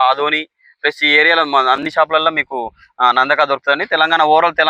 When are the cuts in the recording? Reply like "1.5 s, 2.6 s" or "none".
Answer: none